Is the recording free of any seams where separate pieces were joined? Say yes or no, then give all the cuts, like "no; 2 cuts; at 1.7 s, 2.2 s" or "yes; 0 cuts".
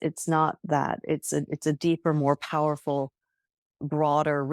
yes; 0 cuts